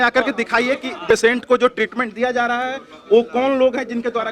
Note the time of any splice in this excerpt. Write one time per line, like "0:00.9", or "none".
0:01.0